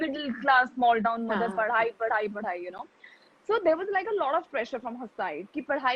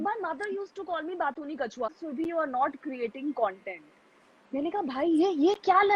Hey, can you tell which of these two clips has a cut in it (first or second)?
second